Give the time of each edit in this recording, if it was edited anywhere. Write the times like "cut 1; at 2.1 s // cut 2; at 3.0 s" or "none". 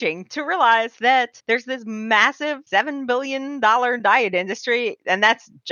cut 1; at 1.4 s // cut 2; at 2.6 s

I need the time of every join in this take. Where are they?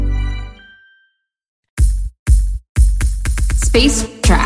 cut 1; at 1.5 s

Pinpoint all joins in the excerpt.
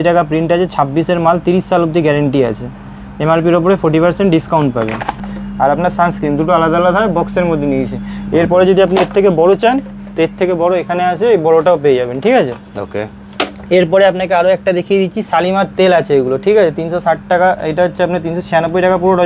cut 1; at 5.3 s

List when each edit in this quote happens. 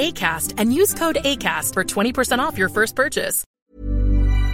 cut 1; at 3.4 s

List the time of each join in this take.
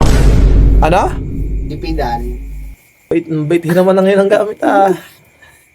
cut 1; at 3.0 s

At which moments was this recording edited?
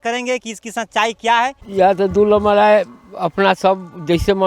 cut 1; at 1.6 s

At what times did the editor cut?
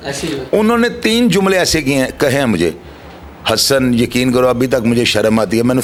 none

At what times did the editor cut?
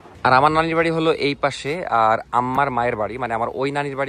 none

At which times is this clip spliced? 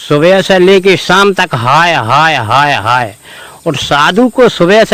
none

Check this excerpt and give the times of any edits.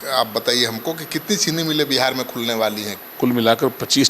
cut 1; at 2.9 s

